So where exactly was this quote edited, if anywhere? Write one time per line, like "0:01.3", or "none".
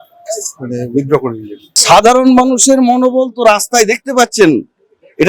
0:01.7